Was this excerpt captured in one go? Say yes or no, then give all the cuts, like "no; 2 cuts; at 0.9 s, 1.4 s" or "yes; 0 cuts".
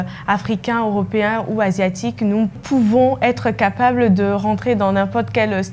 yes; 0 cuts